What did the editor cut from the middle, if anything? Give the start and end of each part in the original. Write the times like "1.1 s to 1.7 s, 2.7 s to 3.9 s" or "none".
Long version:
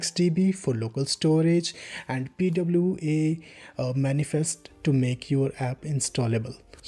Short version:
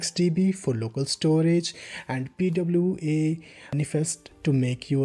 4.0 s to 4.4 s